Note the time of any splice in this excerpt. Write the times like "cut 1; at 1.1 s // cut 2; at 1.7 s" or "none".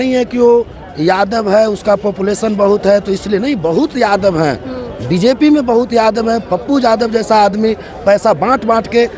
none